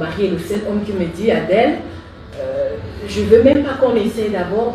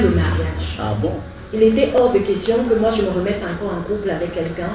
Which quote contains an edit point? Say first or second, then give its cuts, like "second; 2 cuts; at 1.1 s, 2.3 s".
second; 1 cut; at 1.2 s